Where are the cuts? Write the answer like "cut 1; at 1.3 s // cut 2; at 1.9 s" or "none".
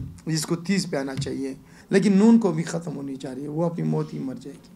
cut 1; at 1.7 s